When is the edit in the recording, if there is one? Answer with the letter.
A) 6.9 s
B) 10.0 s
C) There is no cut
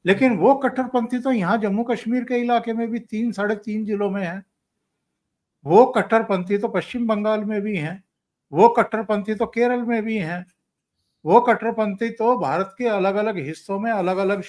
C